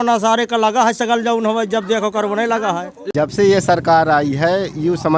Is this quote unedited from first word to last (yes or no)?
no